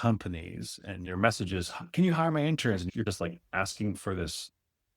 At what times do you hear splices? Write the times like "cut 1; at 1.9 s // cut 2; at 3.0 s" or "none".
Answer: cut 1; at 1.0 s